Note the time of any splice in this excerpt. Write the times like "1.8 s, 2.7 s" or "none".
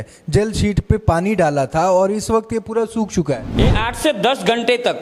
3.6 s